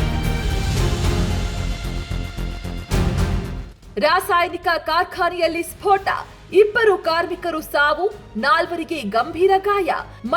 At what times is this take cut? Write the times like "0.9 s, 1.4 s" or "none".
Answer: none